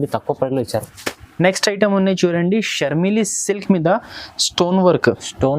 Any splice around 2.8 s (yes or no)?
no